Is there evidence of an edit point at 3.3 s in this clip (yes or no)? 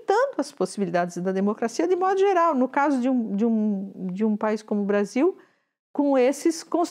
no